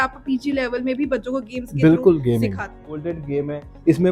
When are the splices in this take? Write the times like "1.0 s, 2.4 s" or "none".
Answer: 2.9 s